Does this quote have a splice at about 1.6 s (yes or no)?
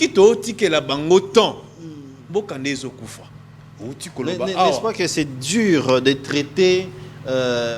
no